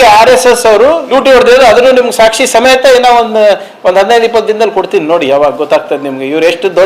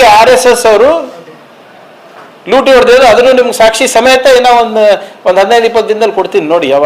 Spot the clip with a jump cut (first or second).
first